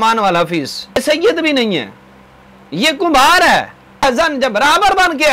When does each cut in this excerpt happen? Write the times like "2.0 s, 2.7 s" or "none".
1.0 s, 4.0 s